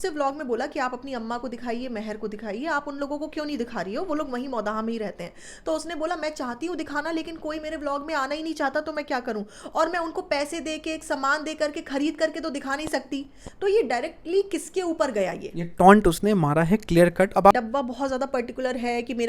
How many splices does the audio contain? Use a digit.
1